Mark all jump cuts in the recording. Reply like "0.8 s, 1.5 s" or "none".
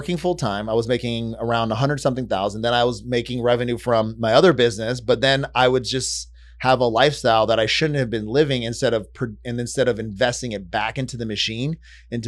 none